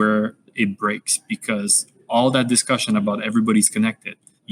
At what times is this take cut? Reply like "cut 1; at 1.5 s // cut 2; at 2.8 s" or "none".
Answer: none